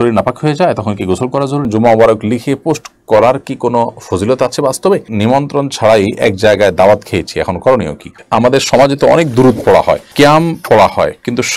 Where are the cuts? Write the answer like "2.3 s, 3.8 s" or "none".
1.6 s, 5.1 s, 8.1 s, 10.1 s